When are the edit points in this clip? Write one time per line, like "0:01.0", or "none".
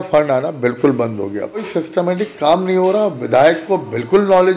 0:01.7